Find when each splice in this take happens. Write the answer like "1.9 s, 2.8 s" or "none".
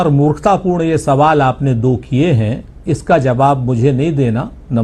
none